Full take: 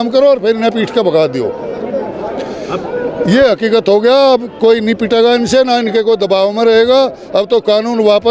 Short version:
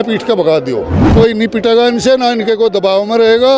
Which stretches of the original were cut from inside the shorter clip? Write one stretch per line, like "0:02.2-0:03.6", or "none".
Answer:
0:01.7-0:04.5